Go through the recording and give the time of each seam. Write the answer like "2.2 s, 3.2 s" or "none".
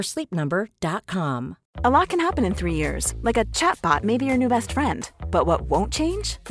1.6 s